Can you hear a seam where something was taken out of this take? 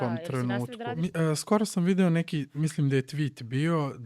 yes; 1 cut; at 0.9 s

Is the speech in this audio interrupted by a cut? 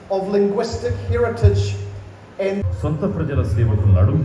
yes; 1 cut; at 2.6 s

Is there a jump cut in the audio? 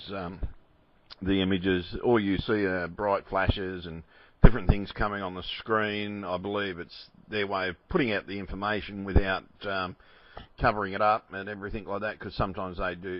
yes; 1 cut; at 2.9 s

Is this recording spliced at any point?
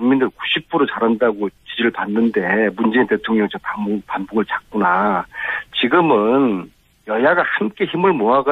yes; 1 cut; at 3.2 s

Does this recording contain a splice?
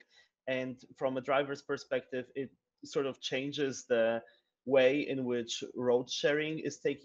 no; 0 cuts

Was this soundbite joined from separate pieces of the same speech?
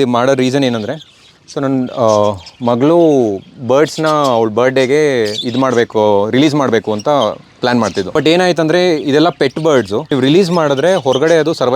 yes; 2 cuts; at 8.1 s, 10.1 s

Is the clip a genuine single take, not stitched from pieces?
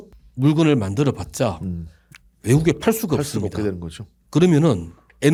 yes; 0 cuts

